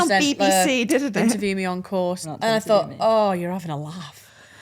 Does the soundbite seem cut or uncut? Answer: cut